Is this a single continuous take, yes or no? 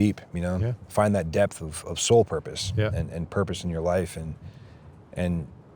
yes